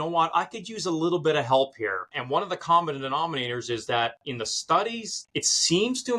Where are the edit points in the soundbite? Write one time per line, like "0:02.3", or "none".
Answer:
0:02.2
0:05.1